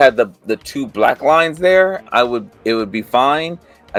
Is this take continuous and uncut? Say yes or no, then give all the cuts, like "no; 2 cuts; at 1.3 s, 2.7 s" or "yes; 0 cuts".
yes; 0 cuts